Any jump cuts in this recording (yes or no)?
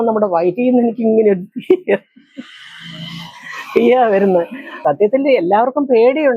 yes